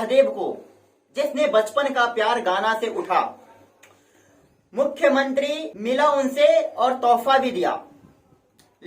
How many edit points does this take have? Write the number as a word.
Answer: one